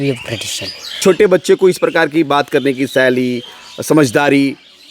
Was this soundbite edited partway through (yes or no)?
yes